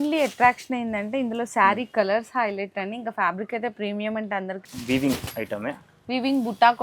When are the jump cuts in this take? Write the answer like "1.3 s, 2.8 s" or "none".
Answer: 4.7 s

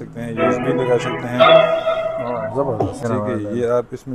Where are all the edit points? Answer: 3.0 s

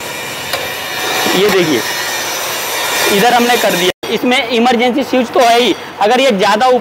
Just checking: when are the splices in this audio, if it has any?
4.0 s

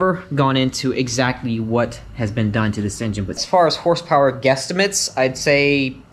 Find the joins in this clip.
3.4 s

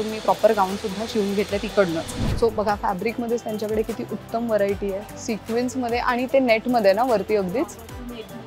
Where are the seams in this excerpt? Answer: 2.2 s

